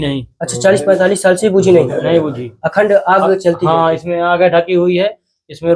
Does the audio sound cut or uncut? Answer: uncut